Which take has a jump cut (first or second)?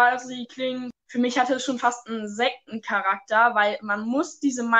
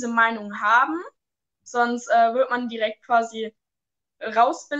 first